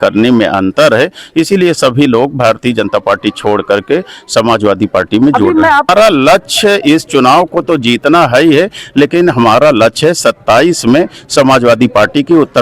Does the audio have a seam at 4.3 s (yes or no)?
no